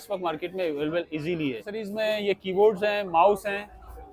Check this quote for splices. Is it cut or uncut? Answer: cut